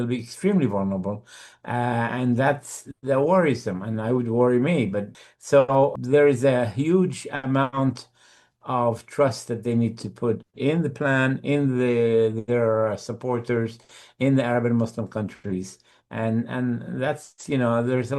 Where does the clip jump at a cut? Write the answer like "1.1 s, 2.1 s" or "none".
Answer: 5.2 s, 6.0 s